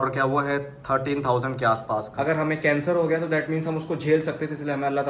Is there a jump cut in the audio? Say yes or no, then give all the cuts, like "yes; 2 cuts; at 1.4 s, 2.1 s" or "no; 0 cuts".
yes; 1 cut; at 2.1 s